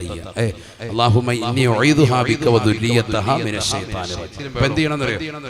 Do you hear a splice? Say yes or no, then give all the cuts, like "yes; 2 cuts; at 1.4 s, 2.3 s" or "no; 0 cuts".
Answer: yes; 1 cut; at 4.5 s